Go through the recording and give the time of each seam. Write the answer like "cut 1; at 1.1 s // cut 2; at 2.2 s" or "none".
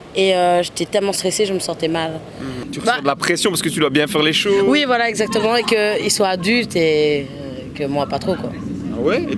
cut 1; at 2.7 s